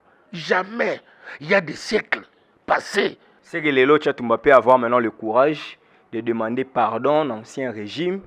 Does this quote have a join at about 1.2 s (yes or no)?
no